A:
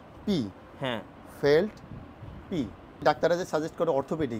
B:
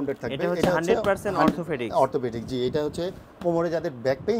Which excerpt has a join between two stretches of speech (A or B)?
A